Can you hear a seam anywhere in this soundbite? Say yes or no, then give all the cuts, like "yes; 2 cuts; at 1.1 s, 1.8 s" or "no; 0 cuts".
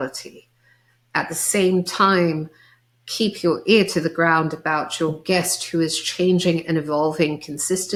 no; 0 cuts